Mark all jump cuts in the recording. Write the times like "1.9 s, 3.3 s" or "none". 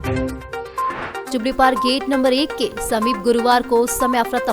1.2 s